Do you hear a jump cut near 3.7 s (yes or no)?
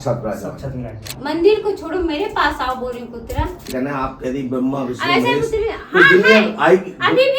yes